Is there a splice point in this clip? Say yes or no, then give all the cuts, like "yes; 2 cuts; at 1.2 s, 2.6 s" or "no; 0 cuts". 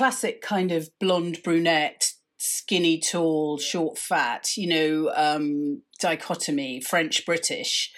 no; 0 cuts